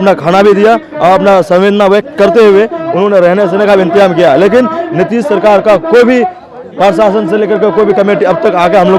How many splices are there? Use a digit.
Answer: 0